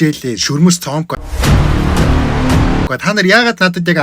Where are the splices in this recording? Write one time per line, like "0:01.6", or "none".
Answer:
0:01.2
0:02.9